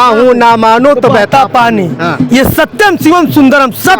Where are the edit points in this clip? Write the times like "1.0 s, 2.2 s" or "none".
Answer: none